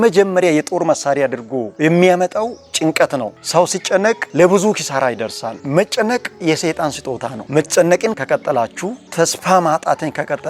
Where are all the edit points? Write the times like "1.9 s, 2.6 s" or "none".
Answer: 5.6 s, 7.4 s, 8.2 s